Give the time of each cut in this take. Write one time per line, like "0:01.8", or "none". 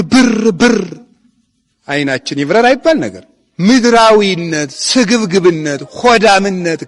none